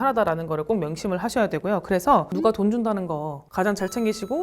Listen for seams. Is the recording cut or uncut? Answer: cut